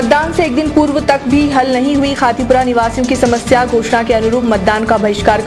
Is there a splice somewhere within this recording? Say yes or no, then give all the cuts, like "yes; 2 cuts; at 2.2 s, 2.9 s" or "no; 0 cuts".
no; 0 cuts